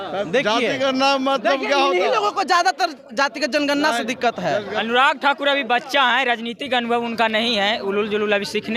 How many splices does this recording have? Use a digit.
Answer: 1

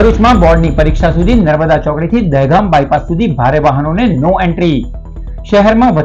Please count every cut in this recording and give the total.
0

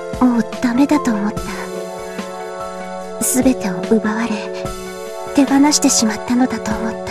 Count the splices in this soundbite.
0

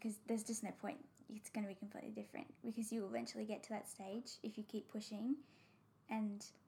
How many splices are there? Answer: 0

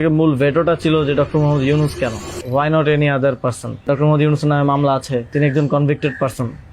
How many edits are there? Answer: 3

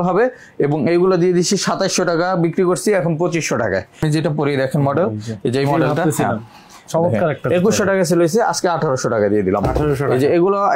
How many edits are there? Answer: 1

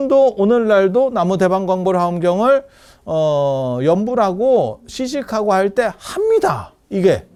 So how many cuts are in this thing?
0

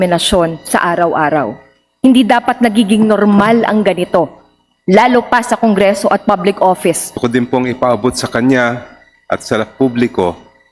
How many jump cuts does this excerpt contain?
1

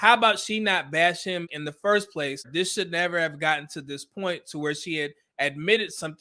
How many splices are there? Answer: 2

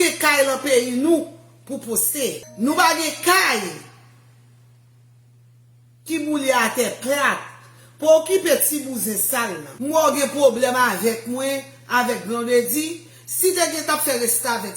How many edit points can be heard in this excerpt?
2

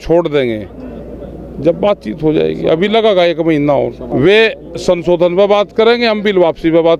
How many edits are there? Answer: 1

